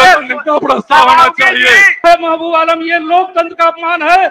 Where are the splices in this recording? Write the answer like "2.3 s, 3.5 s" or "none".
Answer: 2.0 s